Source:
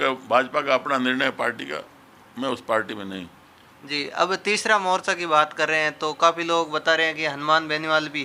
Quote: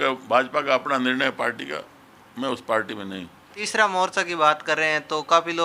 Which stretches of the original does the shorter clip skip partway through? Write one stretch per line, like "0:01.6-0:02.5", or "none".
0:03.7-0:04.6